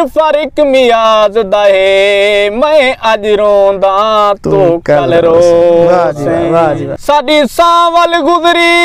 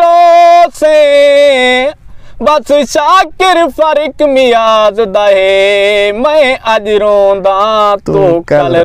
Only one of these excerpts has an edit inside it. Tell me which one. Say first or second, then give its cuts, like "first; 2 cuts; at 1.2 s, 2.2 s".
first; 1 cut; at 6.9 s